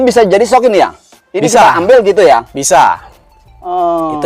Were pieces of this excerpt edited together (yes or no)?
no